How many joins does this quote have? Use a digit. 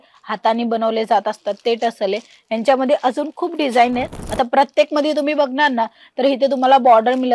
1